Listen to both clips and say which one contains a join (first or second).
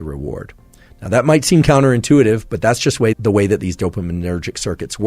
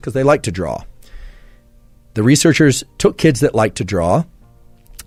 first